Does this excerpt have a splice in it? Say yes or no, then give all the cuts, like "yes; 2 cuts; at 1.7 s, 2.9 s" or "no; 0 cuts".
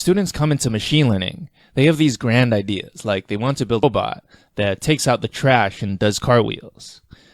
yes; 1 cut; at 3.8 s